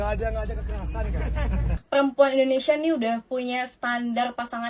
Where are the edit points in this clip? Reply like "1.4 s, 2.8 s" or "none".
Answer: 1.8 s